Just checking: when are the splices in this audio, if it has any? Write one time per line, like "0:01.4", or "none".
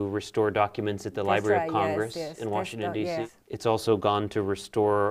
0:03.3